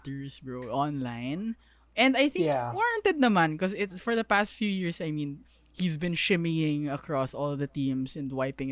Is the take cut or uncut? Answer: uncut